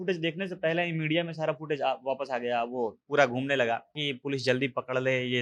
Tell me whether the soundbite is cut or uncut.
cut